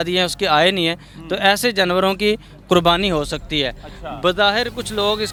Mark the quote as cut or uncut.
uncut